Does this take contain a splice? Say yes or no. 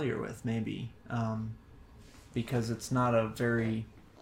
no